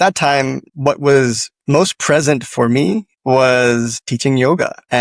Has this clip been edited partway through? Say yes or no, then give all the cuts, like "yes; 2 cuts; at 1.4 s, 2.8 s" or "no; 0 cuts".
no; 0 cuts